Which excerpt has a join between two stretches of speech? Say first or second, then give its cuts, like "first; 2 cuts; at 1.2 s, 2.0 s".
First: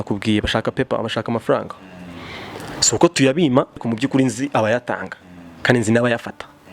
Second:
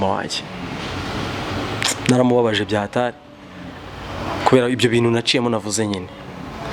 first; 1 cut; at 3.8 s